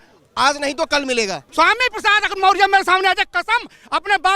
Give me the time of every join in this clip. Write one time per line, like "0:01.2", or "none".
0:01.4